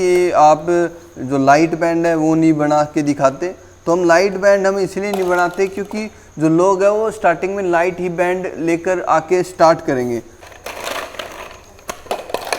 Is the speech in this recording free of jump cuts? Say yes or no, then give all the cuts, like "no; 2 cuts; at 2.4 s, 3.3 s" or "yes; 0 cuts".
no; 1 cut; at 10.4 s